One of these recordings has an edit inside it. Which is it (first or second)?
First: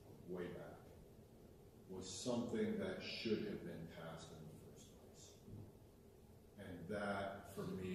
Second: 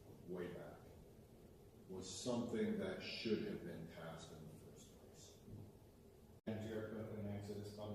second